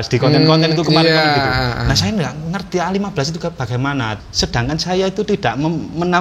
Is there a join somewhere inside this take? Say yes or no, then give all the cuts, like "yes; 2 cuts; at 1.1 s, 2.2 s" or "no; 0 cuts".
yes; 1 cut; at 4.1 s